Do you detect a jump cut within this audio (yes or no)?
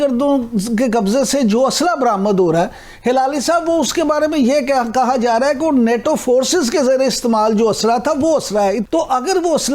no